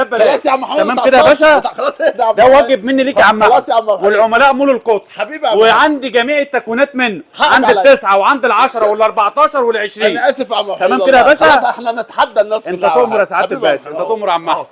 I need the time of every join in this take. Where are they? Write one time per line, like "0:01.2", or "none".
none